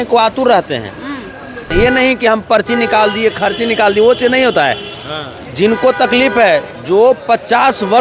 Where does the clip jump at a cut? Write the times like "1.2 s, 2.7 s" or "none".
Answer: 1.6 s